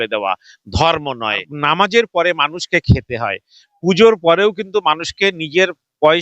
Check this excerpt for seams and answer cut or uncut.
cut